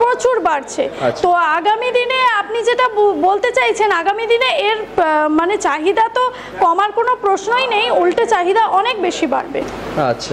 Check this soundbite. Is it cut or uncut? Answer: uncut